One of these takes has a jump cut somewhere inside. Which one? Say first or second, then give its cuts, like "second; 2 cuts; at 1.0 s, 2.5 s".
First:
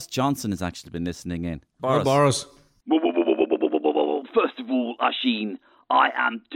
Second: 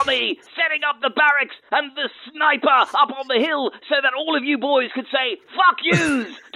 first; 2 cuts; at 1.8 s, 2.7 s